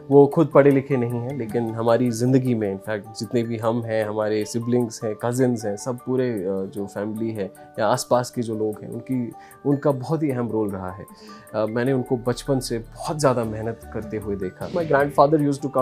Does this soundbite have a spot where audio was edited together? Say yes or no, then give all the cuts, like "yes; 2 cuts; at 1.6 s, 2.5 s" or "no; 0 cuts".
yes; 1 cut; at 14.7 s